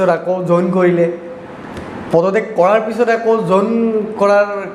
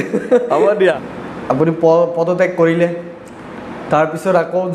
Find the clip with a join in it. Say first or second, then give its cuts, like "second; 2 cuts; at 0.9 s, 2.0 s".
second; 1 cut; at 1.0 s